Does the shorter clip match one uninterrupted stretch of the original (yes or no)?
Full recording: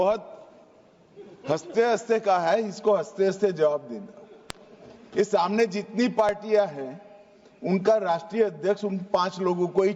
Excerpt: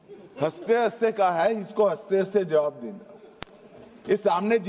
yes